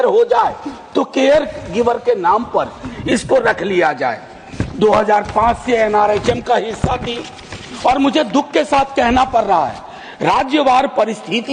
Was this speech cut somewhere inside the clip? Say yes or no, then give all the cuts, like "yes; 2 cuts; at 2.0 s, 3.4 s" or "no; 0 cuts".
no; 0 cuts